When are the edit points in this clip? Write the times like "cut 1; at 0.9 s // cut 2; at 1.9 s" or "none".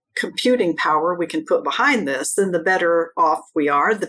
none